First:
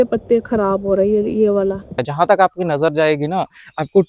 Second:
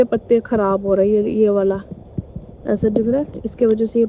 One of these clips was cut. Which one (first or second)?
first